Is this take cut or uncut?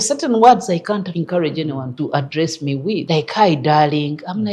cut